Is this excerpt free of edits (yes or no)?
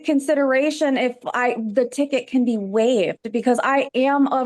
yes